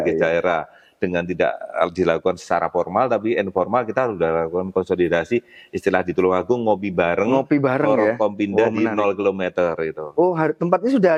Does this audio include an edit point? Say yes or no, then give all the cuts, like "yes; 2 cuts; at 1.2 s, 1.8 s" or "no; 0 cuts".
no; 0 cuts